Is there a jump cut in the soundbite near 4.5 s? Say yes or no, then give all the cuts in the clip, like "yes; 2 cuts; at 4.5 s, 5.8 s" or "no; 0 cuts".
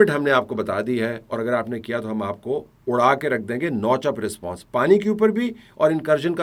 no; 0 cuts